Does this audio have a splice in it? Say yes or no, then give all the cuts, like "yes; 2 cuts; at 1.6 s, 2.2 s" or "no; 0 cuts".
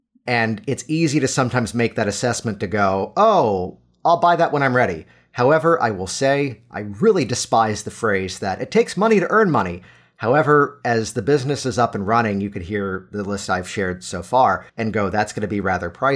yes; 1 cut; at 14.7 s